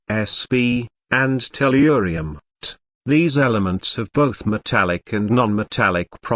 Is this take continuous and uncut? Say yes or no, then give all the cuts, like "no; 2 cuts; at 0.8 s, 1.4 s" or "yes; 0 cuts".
no; 1 cut; at 4.0 s